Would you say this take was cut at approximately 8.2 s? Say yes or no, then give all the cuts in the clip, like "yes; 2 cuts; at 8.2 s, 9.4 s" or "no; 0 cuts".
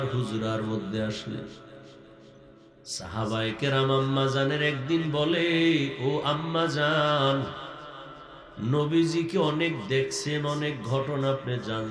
no; 0 cuts